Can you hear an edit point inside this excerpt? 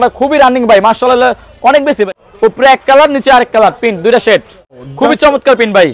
yes; 2 cuts; at 2.1 s, 4.8 s

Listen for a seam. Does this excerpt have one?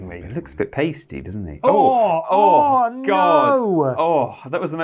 no; 0 cuts

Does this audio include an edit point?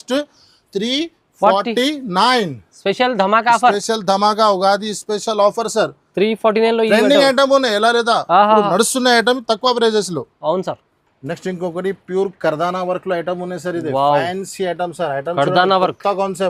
no; 0 cuts

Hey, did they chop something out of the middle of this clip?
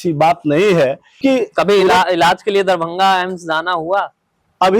yes; 1 cut; at 1.2 s

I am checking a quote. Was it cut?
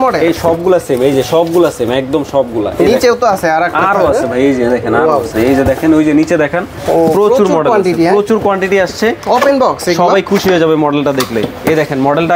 no; 0 cuts

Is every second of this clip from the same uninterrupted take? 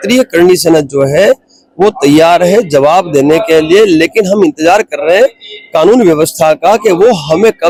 yes; 0 cuts

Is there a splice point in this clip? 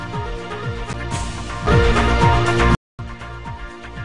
yes; 1 cut; at 0.9 s

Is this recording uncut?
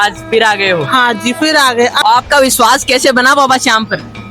no; 1 cut; at 2.0 s

